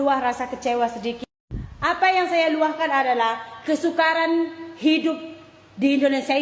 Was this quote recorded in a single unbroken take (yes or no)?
yes